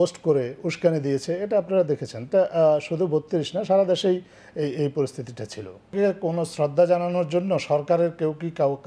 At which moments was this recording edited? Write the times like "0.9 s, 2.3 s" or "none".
5.9 s